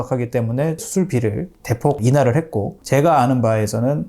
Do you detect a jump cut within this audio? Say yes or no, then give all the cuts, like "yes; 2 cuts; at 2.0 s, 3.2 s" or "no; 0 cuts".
yes; 2 cuts; at 0.8 s, 2.8 s